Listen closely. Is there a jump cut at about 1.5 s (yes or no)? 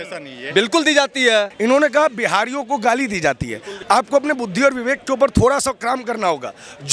yes